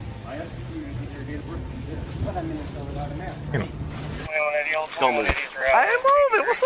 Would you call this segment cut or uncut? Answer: cut